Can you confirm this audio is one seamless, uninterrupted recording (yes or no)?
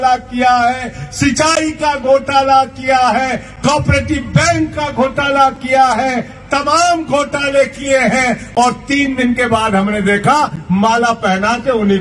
yes